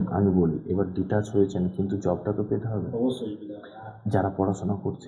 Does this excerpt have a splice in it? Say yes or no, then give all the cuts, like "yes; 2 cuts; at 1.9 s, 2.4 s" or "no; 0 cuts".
no; 0 cuts